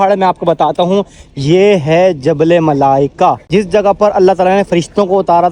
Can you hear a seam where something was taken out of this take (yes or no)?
yes